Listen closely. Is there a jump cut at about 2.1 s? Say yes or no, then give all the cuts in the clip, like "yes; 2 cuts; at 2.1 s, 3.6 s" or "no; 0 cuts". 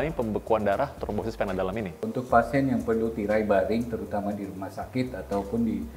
yes; 1 cut; at 2.1 s